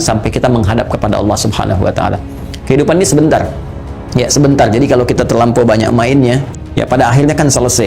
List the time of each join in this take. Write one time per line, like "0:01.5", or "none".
0:06.5